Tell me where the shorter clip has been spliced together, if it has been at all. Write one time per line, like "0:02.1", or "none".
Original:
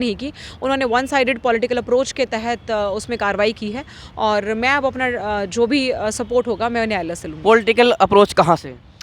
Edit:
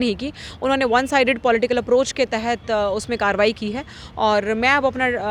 none